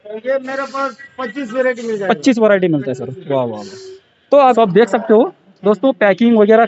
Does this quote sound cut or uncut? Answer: cut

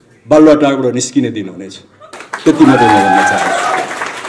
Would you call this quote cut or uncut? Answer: uncut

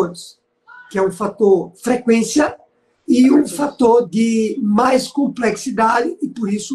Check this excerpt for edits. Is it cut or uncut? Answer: cut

